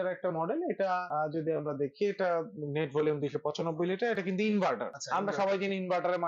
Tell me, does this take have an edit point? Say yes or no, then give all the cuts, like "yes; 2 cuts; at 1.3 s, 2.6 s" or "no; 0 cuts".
yes; 2 cuts; at 1.1 s, 4.9 s